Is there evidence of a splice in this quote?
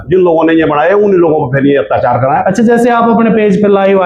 no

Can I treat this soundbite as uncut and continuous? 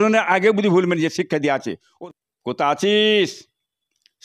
no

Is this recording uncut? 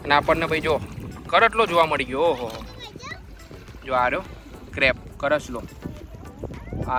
yes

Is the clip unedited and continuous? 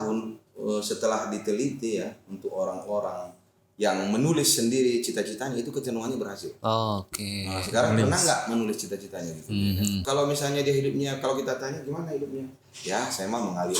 no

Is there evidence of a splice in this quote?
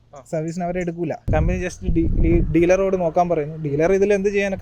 yes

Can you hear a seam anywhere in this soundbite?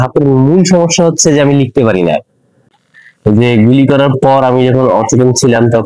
yes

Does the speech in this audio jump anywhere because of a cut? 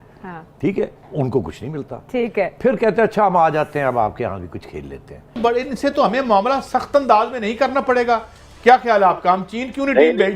yes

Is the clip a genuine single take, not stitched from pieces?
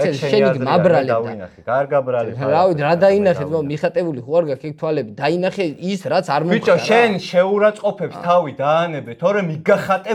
yes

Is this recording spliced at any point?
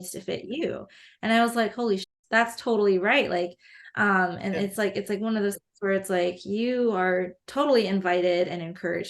yes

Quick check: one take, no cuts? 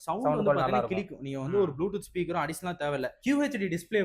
yes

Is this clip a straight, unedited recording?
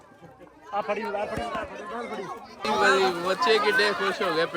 no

